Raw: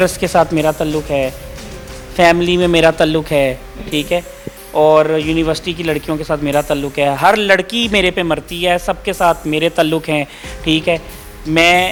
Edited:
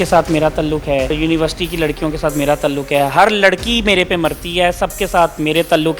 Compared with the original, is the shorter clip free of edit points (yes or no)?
no